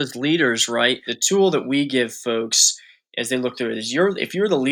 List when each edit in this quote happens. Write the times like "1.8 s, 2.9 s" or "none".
1.1 s